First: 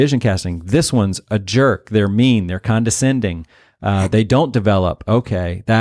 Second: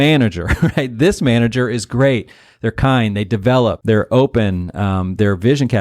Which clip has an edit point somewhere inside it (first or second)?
second